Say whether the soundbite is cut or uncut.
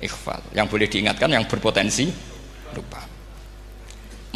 uncut